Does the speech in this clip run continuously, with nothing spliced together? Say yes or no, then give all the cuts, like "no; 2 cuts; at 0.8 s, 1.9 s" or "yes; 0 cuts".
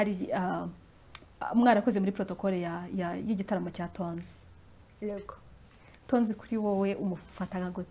yes; 0 cuts